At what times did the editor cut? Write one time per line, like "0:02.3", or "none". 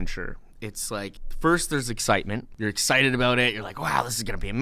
0:01.2
0:02.4